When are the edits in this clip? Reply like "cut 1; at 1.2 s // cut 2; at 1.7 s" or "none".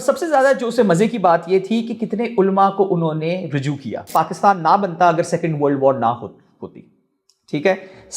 cut 1; at 4.0 s